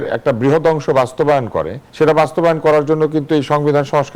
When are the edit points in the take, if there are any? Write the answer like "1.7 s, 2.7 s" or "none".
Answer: 1.8 s